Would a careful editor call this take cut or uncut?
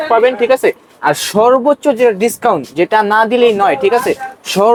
uncut